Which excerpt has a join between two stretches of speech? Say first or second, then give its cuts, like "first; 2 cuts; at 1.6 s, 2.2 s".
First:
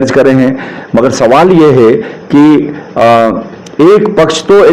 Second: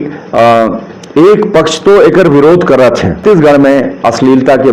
second; 1 cut; at 3.2 s